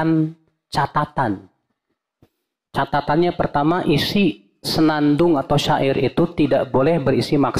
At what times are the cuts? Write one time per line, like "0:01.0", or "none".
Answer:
none